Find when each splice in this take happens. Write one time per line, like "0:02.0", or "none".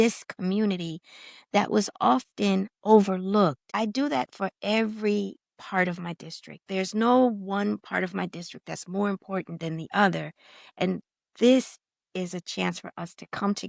0:03.6